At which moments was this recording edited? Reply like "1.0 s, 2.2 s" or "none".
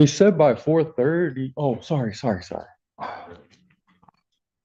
none